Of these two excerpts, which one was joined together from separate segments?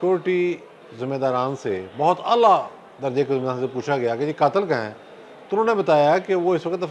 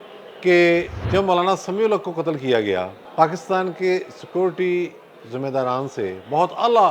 second; 2 cuts; at 1.0 s, 3.0 s

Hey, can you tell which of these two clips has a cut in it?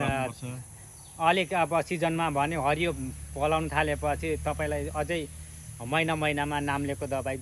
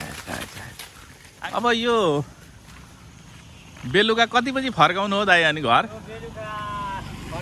second; 1 cut; at 1.2 s

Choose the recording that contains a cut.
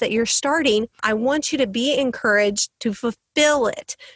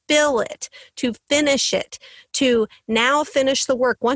first; 1 cut; at 1.0 s

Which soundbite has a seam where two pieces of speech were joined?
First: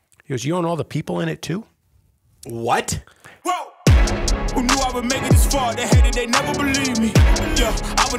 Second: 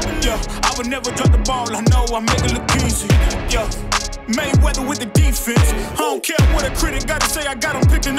first; 1 cut; at 3.3 s

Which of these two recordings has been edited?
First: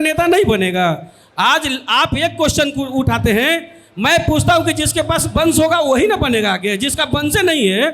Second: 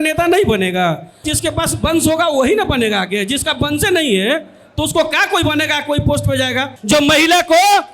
second; 2 cuts; at 1.3 s, 6.7 s

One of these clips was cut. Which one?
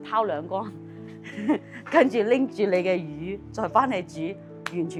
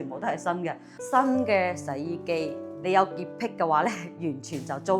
second; 1 cut; at 0.9 s

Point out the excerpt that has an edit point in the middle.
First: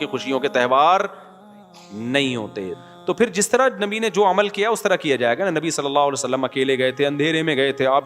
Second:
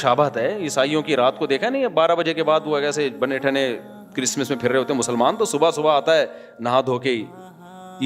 first; 1 cut; at 2.7 s

